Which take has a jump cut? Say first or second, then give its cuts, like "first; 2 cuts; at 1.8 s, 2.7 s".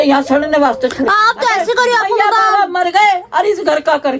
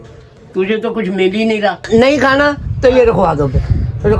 second; 1 cut; at 1.9 s